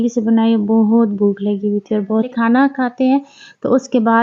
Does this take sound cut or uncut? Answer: cut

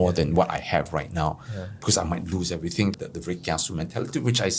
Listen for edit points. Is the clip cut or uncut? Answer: cut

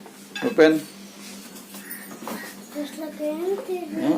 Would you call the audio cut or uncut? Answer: cut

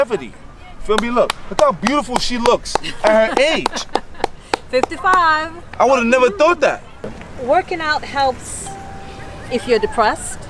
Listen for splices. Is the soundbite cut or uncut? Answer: cut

